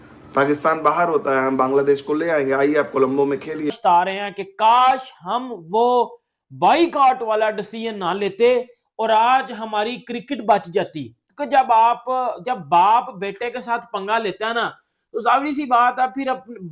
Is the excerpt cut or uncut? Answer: cut